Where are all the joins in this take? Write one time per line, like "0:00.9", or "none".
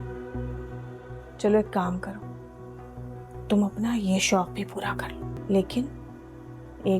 0:05.4